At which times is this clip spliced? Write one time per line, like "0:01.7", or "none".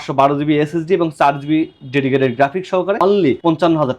0:03.0